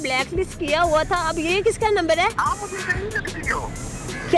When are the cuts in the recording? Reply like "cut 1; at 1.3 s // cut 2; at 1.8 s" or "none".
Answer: cut 1; at 2.3 s

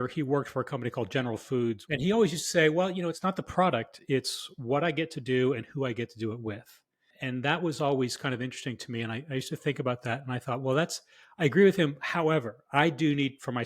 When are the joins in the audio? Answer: cut 1; at 1.8 s // cut 2; at 3.2 s

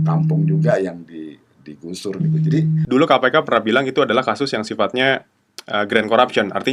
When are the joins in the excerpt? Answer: cut 1; at 2.8 s

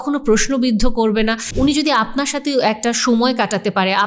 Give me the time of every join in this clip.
cut 1; at 1.4 s

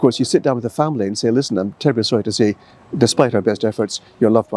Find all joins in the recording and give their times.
none

